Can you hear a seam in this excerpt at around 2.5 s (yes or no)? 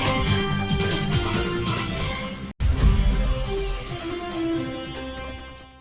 yes